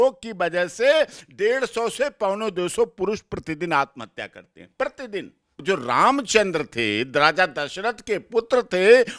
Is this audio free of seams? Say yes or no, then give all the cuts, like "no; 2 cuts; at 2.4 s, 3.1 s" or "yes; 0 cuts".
no; 1 cut; at 5.6 s